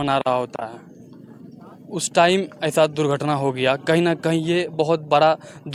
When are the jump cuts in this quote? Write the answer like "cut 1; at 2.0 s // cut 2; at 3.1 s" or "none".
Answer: none